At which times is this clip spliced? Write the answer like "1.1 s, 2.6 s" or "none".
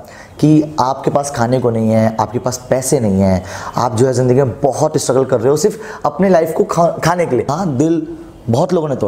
7.5 s